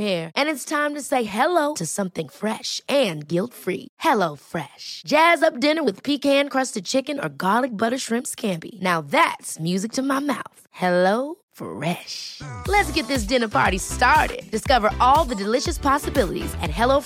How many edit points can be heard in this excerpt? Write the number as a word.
zero